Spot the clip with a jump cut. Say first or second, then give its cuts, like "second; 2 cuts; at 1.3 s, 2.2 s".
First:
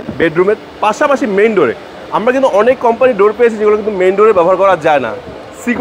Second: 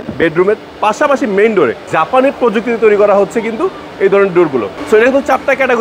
second; 2 cuts; at 1.9 s, 4.8 s